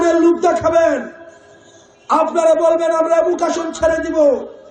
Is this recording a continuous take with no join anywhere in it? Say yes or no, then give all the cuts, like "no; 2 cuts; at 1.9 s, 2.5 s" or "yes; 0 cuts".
yes; 0 cuts